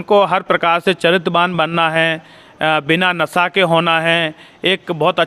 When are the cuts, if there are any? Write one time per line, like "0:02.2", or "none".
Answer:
none